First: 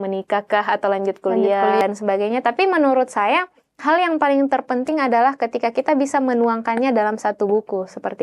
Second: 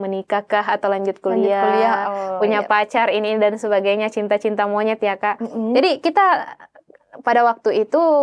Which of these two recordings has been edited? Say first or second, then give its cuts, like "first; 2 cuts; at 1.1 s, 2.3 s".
first; 1 cut; at 1.8 s